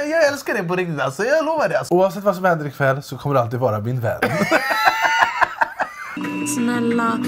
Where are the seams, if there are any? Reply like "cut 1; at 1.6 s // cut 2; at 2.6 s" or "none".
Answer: cut 1; at 1.8 s // cut 2; at 6.2 s